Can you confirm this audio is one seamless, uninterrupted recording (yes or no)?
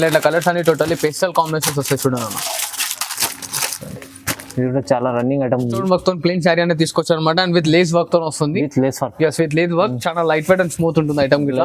no